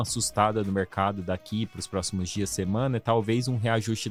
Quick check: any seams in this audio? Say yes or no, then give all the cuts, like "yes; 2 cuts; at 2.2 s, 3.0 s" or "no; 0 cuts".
no; 0 cuts